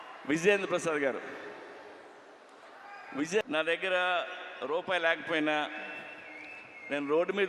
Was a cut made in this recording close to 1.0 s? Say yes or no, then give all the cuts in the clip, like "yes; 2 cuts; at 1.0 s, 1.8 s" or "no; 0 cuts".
no; 1 cut; at 3.4 s